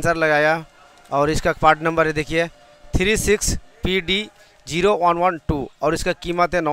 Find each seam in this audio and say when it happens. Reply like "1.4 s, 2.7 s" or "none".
none